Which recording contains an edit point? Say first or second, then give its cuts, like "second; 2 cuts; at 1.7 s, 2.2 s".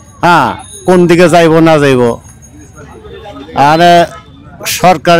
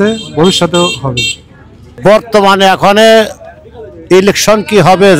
second; 1 cut; at 2.1 s